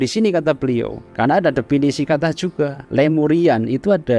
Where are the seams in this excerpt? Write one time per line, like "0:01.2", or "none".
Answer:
0:01.0
0:02.8